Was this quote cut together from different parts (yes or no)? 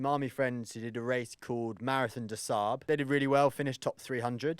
yes